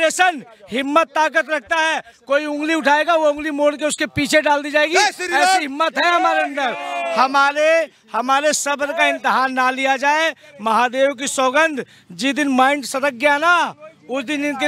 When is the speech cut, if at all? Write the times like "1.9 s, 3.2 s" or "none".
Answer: none